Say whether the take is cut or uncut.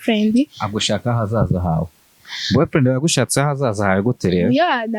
cut